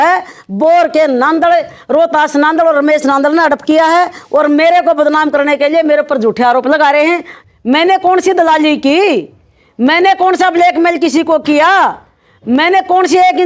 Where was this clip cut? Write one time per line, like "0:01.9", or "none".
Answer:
0:07.3